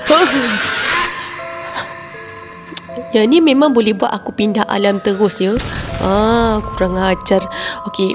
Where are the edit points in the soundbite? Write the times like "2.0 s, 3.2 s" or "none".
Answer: none